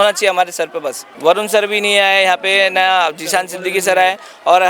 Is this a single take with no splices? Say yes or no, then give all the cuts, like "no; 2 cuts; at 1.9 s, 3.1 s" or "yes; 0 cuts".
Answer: no; 1 cut; at 1.1 s